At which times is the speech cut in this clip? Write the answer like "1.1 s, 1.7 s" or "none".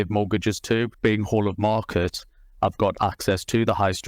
0.9 s